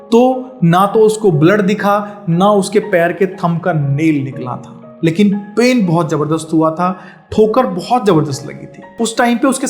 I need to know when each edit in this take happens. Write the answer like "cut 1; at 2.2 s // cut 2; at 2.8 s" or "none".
none

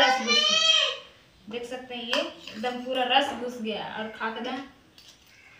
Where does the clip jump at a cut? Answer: none

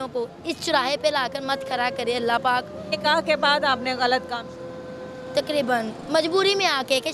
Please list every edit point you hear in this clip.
cut 1; at 2.8 s

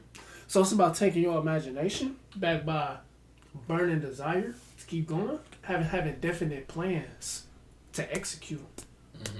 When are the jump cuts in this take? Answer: cut 1; at 2.3 s // cut 2; at 5.6 s

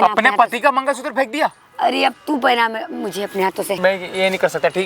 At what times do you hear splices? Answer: cut 1; at 3.8 s

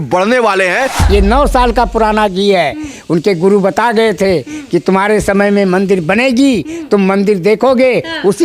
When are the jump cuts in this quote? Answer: cut 1; at 1.0 s

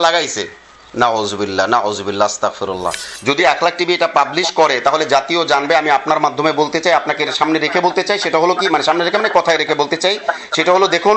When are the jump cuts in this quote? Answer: cut 1; at 3.1 s

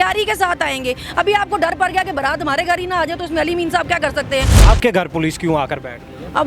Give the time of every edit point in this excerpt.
cut 1; at 4.5 s

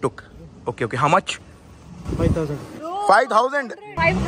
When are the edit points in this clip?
none

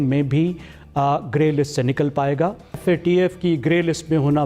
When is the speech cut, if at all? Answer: cut 1; at 2.8 s

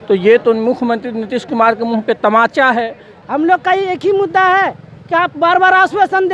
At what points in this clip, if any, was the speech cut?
cut 1; at 3.1 s

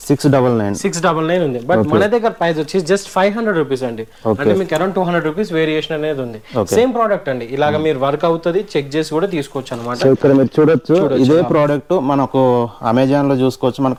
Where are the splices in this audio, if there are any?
none

